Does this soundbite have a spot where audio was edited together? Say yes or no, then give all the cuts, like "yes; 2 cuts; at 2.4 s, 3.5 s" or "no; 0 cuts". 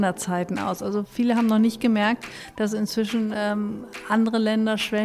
no; 0 cuts